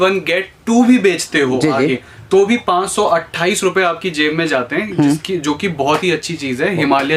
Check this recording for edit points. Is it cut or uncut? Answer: uncut